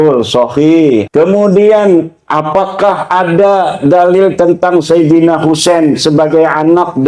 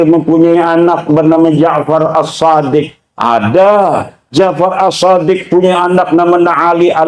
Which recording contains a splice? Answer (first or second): first